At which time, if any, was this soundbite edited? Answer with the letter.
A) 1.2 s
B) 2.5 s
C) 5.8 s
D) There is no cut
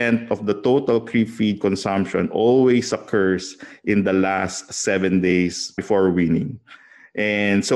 C